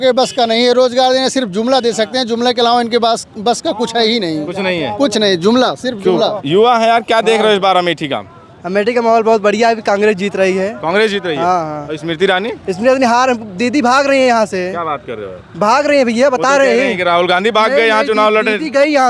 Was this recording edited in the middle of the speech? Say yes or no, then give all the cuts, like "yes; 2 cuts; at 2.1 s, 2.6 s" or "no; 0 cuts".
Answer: no; 0 cuts